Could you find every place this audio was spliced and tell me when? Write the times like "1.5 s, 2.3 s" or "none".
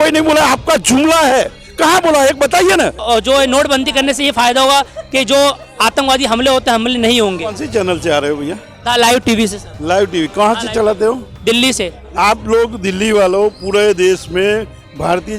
3.0 s